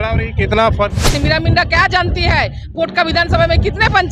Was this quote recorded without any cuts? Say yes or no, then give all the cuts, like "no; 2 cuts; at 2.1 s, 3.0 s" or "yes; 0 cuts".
no; 1 cut; at 1.1 s